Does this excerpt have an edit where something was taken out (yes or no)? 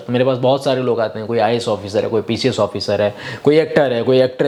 no